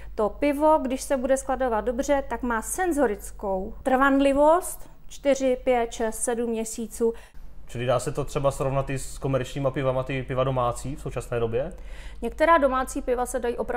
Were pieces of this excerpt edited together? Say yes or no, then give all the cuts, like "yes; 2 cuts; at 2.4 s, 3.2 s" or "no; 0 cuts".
yes; 1 cut; at 7.3 s